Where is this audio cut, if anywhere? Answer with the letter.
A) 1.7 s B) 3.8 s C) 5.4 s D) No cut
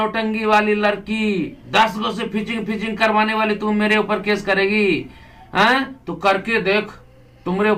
D